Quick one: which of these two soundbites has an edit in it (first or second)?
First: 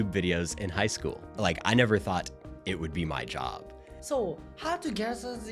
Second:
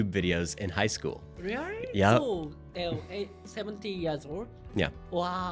first